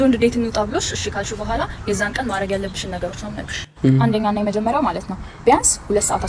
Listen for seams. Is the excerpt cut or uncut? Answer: uncut